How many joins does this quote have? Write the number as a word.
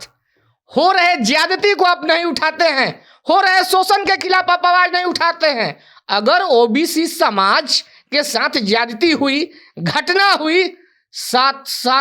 zero